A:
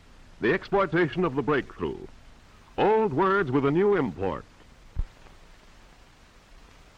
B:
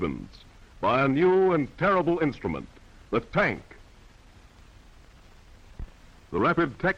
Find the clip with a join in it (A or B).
A